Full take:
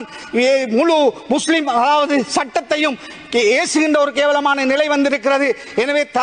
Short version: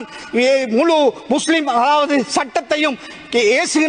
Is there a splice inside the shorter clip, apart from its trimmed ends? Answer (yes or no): no